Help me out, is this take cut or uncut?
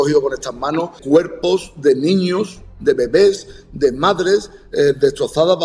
cut